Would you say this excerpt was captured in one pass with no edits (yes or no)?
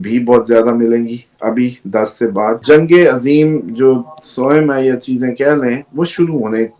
no